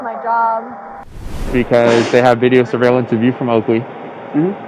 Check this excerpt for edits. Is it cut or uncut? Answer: cut